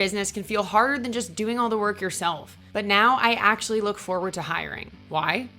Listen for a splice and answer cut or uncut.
uncut